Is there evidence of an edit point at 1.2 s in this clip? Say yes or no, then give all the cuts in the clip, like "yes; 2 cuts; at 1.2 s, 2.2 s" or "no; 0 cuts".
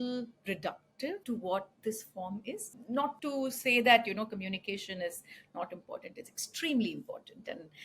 yes; 2 cuts; at 1.2 s, 3.1 s